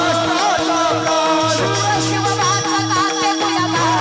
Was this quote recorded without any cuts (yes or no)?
yes